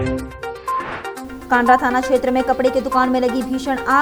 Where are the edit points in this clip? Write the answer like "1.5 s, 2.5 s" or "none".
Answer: none